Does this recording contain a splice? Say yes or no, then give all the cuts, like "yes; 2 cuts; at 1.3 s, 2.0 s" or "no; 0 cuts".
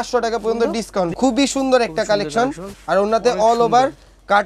yes; 2 cuts; at 1.1 s, 2.7 s